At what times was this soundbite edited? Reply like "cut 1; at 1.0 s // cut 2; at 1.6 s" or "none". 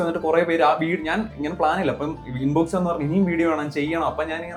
none